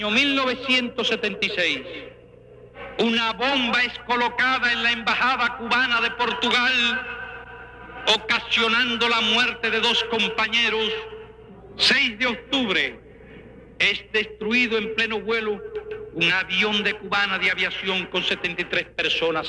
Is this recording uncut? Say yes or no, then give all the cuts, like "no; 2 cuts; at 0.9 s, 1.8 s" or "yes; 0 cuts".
no; 1 cut; at 14.1 s